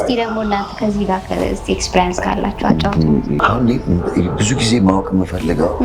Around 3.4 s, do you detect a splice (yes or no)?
yes